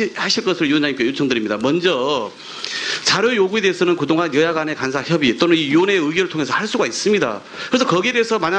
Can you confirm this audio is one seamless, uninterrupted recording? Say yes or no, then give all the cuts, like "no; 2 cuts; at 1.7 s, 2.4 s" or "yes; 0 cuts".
yes; 0 cuts